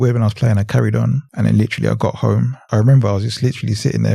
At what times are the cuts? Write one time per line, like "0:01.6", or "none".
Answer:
0:01.3
0:02.6